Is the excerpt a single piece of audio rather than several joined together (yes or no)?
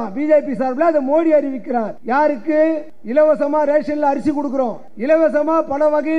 no